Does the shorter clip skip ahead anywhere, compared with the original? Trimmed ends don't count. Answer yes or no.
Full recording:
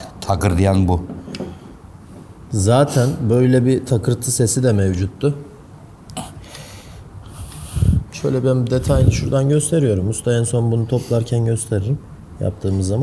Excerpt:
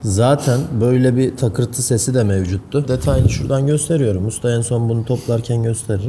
yes